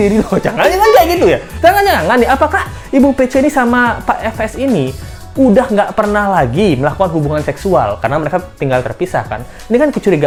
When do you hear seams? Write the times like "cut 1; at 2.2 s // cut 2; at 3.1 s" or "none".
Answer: none